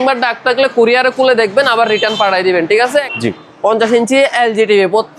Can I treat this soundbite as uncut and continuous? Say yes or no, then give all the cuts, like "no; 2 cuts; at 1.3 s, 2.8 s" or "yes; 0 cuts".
no; 1 cut; at 3.1 s